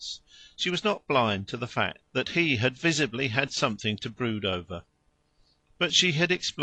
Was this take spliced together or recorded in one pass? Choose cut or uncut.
cut